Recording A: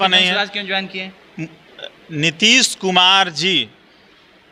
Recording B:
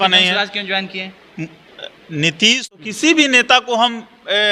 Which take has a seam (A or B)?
B